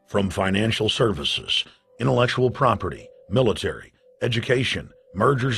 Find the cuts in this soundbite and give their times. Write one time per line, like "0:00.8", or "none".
0:03.1